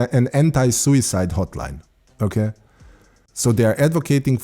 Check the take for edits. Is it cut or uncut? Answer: cut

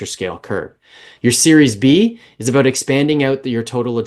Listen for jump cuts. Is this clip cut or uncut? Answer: uncut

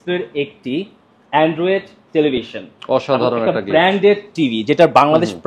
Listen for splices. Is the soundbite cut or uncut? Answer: uncut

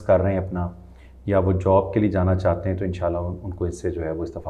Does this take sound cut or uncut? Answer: uncut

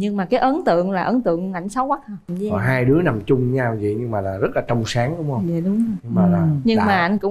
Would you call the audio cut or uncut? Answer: cut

